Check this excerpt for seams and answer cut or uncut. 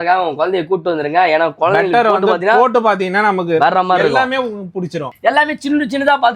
cut